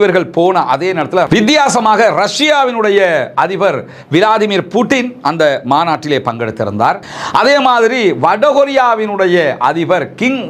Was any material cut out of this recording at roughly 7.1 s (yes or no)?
yes